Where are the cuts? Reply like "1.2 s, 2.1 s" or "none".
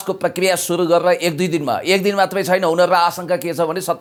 none